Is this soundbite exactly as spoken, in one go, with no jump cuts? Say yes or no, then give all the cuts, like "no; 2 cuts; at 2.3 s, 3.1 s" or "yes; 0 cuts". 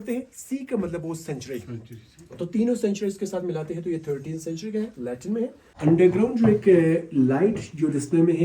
no; 1 cut; at 5.6 s